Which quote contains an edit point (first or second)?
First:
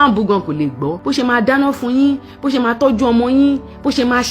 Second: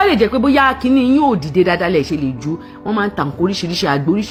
first